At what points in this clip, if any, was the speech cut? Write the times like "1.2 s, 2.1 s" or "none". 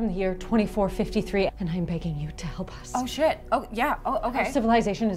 1.5 s

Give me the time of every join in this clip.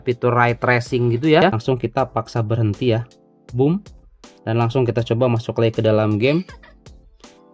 1.5 s

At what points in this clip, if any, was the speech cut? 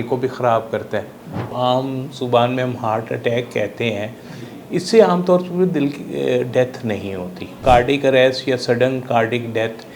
1.5 s, 7.6 s

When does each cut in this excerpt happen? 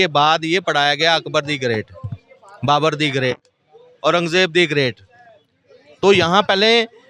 none

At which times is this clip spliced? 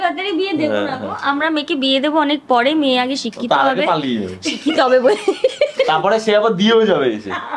none

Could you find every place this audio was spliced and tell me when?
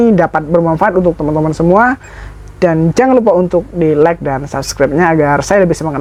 none

